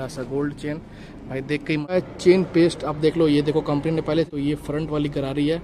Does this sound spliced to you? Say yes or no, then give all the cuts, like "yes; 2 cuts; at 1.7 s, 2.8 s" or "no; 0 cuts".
yes; 2 cuts; at 1.9 s, 4.3 s